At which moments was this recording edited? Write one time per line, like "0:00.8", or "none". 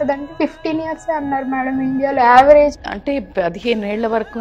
0:02.8